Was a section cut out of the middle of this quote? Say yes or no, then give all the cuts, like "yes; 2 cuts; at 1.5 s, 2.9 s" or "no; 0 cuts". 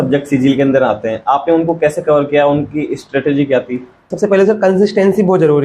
yes; 1 cut; at 4.1 s